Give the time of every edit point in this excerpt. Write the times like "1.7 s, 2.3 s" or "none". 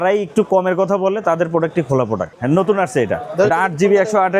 2.4 s